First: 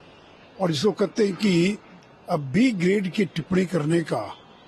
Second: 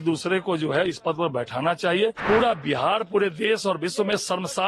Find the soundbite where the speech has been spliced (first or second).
second